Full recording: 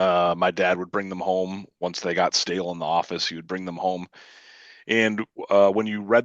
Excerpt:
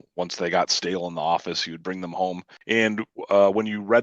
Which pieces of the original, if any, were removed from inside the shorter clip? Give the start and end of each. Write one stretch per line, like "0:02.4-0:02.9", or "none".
0:04.1-0:04.7